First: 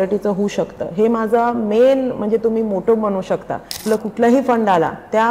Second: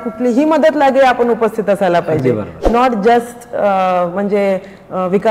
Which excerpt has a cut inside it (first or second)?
first